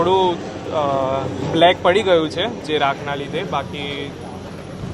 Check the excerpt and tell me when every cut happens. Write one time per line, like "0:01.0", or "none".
none